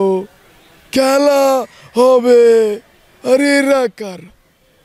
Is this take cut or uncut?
uncut